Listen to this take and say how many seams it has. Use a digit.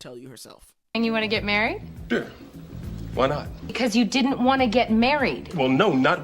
2